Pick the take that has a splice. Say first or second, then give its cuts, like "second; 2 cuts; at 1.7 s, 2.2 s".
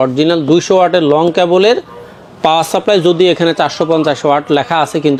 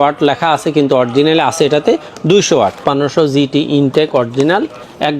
second; 1 cut; at 2.8 s